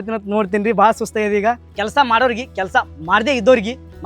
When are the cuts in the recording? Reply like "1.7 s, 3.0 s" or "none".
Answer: 1.6 s